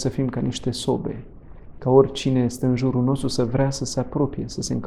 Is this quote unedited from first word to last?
yes; 0 cuts

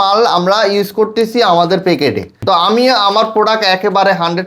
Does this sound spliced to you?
yes; 1 cut; at 2.4 s

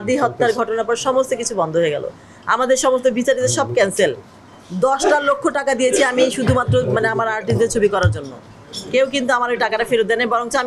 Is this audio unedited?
yes; 0 cuts

